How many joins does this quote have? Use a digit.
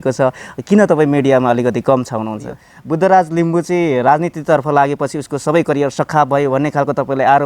1